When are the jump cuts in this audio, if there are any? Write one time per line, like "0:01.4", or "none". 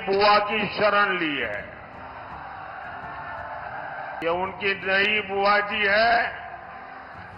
0:04.2